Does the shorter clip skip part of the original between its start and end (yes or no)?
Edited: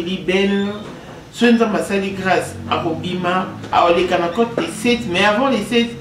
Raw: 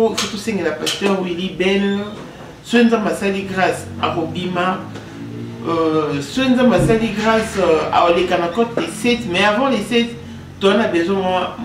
yes